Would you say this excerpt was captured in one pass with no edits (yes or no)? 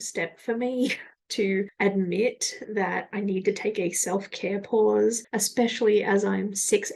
yes